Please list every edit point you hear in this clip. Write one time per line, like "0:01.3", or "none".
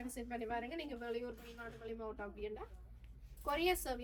none